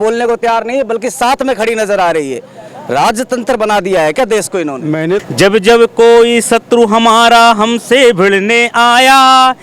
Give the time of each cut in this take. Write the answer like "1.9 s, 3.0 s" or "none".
5.3 s